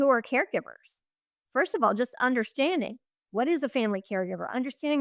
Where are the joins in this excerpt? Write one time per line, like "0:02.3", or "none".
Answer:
none